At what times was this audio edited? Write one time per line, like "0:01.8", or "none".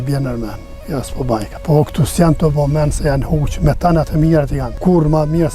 0:01.5
0:04.6